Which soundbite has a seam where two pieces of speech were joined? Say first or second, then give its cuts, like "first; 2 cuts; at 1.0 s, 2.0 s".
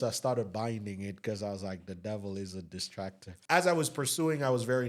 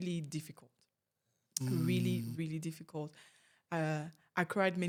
first; 1 cut; at 3.3 s